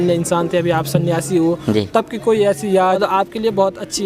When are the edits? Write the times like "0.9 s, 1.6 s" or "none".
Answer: 3.0 s